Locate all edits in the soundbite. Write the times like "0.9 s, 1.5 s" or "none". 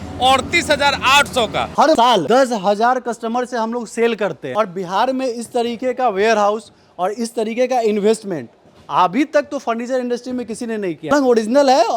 4.4 s, 11.0 s